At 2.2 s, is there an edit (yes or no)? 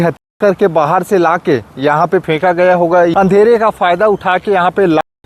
yes